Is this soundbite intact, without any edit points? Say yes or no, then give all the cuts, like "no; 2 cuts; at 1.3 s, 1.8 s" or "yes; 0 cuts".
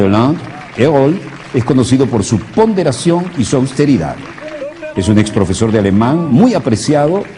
no; 1 cut; at 3.7 s